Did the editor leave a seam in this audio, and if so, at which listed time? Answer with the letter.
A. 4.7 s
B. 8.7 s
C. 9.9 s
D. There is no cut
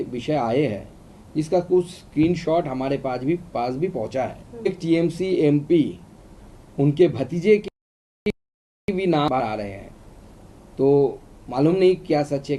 A